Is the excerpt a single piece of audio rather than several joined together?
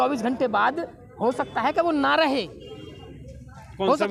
yes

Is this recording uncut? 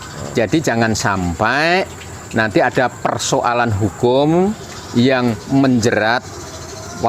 yes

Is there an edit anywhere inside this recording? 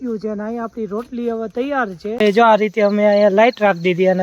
yes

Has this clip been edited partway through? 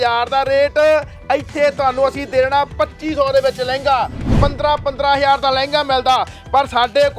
yes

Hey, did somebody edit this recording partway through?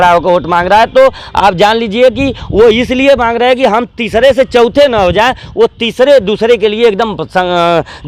no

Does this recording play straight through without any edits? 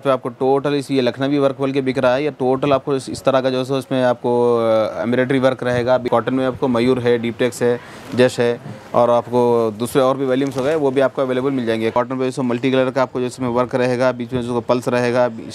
no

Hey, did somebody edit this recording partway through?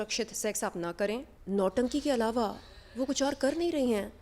yes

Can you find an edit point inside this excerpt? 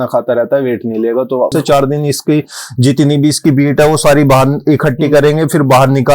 yes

